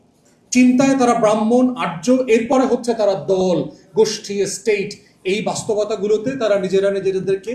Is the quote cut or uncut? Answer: uncut